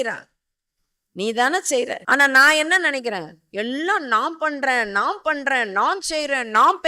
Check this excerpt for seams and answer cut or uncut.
cut